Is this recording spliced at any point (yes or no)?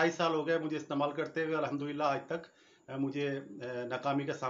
no